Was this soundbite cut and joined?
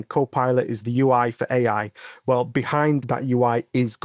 yes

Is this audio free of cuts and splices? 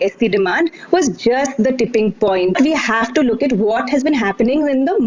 no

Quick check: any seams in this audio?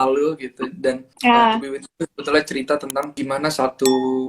yes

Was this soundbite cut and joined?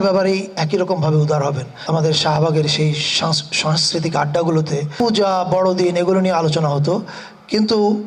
yes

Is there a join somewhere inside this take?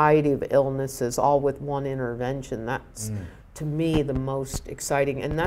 no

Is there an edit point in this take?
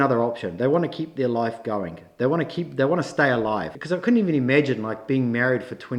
yes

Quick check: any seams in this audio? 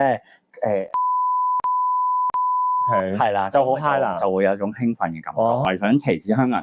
yes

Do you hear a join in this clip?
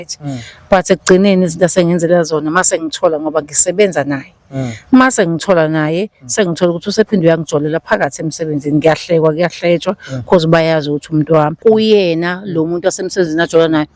yes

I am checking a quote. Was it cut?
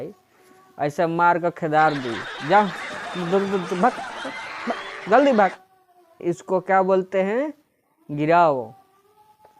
yes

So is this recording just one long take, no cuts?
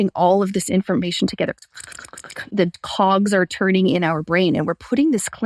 yes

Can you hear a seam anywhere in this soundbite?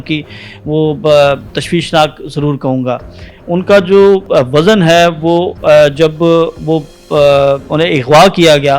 no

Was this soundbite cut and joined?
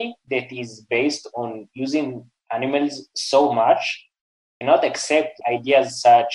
no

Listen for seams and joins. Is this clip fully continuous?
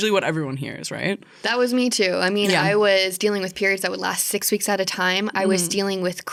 yes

